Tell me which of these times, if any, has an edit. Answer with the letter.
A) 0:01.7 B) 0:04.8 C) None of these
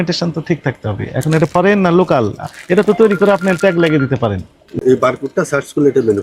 B